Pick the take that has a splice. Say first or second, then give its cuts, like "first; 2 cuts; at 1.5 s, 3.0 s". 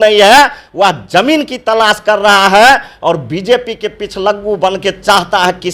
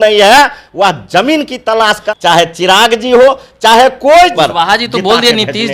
second; 2 cuts; at 2.1 s, 4.3 s